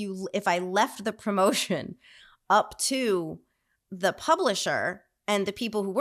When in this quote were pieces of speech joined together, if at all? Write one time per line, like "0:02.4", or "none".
none